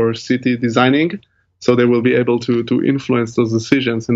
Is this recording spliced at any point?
no; 0 cuts

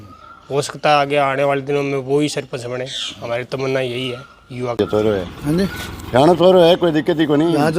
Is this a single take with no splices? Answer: no; 1 cut; at 4.8 s

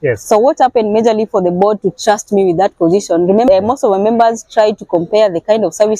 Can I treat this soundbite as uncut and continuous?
no; 1 cut; at 3.5 s

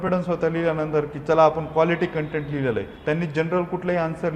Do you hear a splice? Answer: yes; 1 cut; at 2.9 s

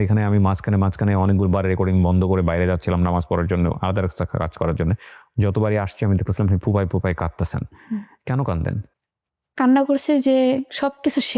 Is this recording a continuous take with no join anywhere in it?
yes; 0 cuts

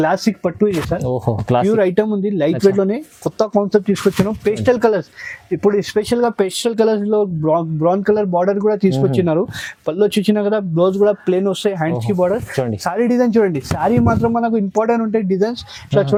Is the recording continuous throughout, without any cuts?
yes; 0 cuts

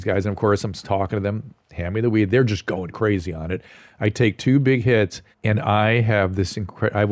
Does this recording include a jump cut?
yes; 1 cut; at 5.3 s

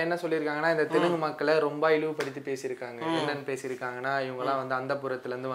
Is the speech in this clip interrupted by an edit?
no; 0 cuts

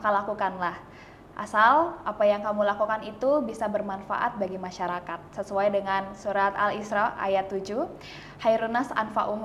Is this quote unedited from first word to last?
yes; 0 cuts

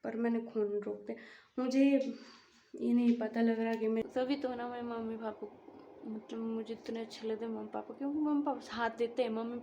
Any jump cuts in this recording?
yes; 1 cut; at 4.0 s

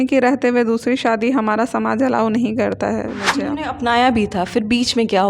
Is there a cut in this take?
yes; 1 cut; at 3.2 s

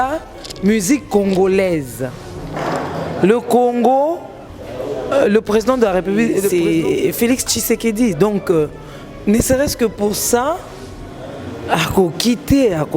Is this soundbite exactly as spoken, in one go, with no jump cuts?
no; 1 cut; at 6.5 s

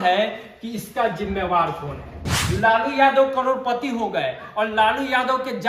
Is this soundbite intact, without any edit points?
no; 1 cut; at 2.3 s

